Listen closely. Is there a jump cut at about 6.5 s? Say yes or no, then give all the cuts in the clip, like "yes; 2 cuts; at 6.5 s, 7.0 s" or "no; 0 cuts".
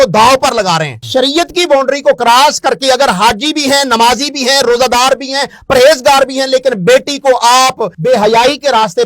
no; 2 cuts; at 1.0 s, 7.9 s